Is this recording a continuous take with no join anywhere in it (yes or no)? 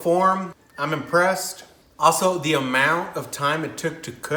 yes